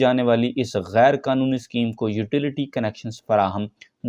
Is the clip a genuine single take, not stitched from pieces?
yes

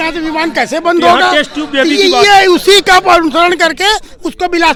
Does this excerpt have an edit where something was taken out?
no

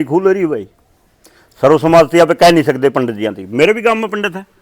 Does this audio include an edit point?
no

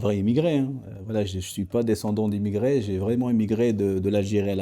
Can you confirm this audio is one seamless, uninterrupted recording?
yes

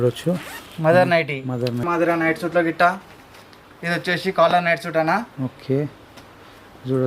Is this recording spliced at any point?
yes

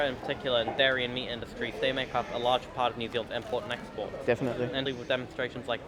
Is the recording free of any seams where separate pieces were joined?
no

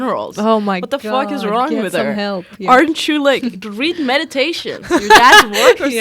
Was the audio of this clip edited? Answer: no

